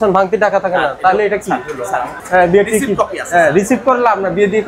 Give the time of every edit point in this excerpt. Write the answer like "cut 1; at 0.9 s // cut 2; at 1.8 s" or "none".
cut 1; at 2.2 s

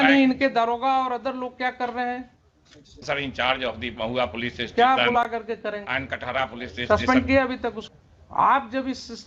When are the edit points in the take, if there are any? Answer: cut 1; at 3.0 s // cut 2; at 7.8 s

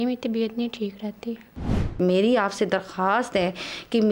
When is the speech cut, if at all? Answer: cut 1; at 1.6 s

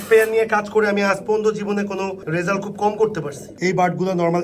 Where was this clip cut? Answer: cut 1; at 3.5 s

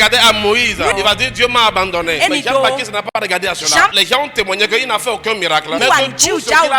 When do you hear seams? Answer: cut 1; at 0.9 s // cut 2; at 2.3 s // cut 3; at 3.9 s // cut 4; at 5.8 s

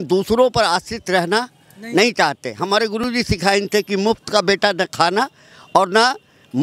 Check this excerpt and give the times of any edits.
none

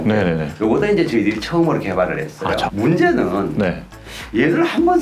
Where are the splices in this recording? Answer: cut 1; at 2.7 s

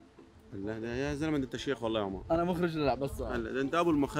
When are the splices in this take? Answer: none

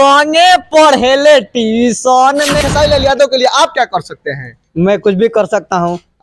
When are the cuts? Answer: cut 1; at 2.6 s

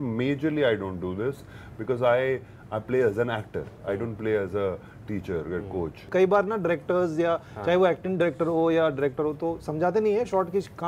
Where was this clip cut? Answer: cut 1; at 6.1 s

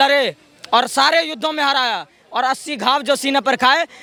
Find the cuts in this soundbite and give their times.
none

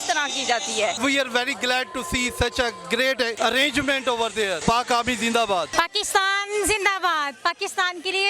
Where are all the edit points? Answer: cut 1; at 1.0 s // cut 2; at 3.3 s // cut 3; at 4.6 s // cut 4; at 5.7 s

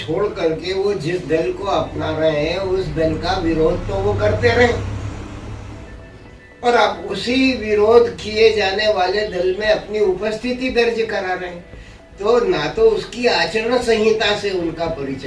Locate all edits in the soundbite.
none

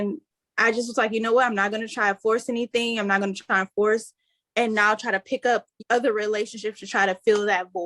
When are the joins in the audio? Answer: cut 1; at 5.8 s

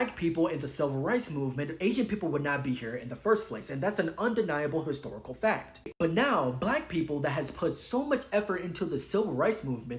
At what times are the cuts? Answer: cut 1; at 5.9 s

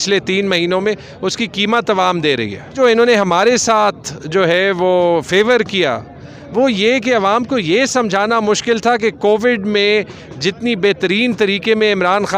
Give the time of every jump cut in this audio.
cut 1; at 2.7 s

